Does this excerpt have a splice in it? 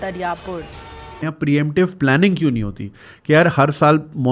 yes; 1 cut; at 1.2 s

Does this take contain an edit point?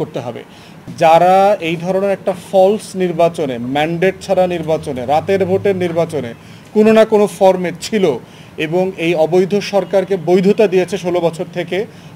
yes; 1 cut; at 0.9 s

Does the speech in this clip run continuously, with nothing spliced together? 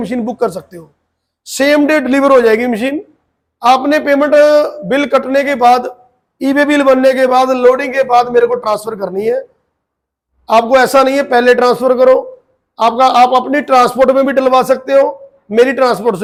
yes; 0 cuts

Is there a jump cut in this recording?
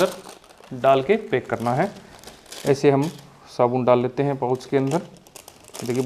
no; 0 cuts

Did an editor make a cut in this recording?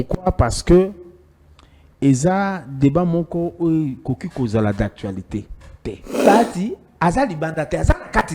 yes; 1 cut; at 6.2 s

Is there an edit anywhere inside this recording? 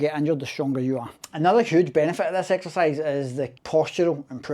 yes; 1 cut; at 1.1 s

